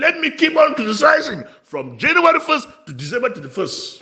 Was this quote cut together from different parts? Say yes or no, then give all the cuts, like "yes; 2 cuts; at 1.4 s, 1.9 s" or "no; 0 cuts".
no; 0 cuts